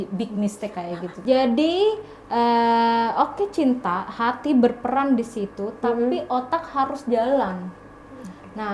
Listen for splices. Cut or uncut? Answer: cut